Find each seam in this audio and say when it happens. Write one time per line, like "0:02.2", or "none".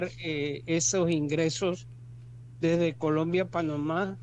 none